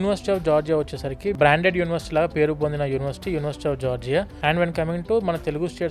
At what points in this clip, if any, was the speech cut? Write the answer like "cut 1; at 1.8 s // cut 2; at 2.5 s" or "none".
cut 1; at 1.4 s // cut 2; at 4.3 s